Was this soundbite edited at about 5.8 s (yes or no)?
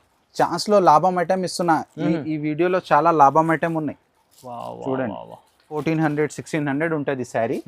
yes